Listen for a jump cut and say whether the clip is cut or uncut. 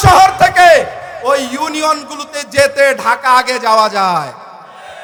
uncut